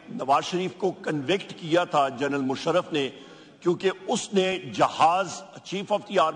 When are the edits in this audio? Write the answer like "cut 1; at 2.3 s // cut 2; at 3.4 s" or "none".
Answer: none

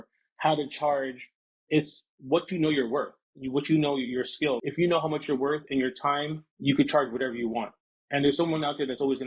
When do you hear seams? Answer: cut 1; at 4.7 s

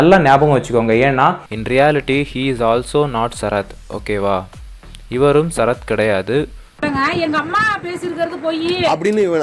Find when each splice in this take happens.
cut 1; at 1.5 s // cut 2; at 6.8 s

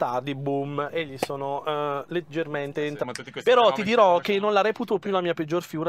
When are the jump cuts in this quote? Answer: cut 1; at 3.3 s

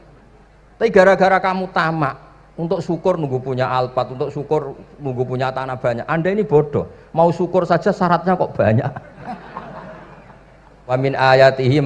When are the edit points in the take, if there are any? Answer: cut 1; at 11.0 s

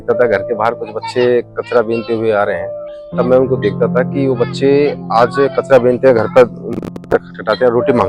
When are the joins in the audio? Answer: cut 1; at 3.0 s

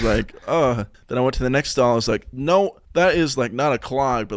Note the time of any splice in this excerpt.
cut 1; at 0.9 s // cut 2; at 2.8 s

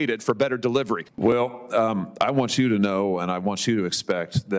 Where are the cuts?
cut 1; at 1.3 s

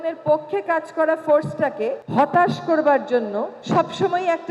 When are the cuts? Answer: cut 1; at 2.0 s // cut 2; at 3.5 s

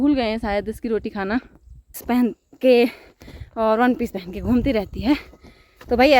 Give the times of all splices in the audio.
cut 1; at 2.0 s

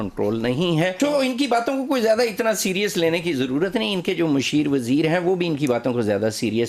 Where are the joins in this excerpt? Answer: none

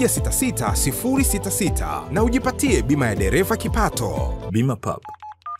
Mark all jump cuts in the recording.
cut 1; at 4.4 s

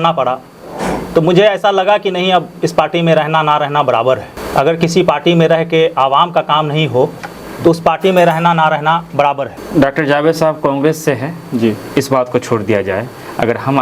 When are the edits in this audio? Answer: cut 1; at 4.4 s // cut 2; at 9.5 s

